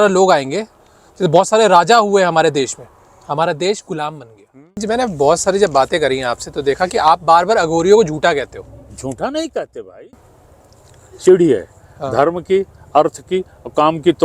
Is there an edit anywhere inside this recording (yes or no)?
yes